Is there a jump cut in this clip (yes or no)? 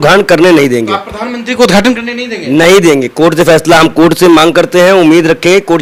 no